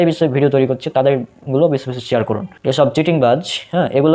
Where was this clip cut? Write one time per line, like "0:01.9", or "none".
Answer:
0:02.5